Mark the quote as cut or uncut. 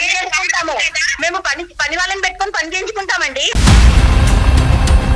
cut